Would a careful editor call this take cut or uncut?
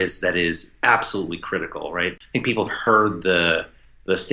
cut